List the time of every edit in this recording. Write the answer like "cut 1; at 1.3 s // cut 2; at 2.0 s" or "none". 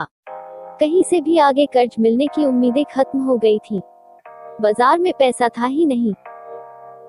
none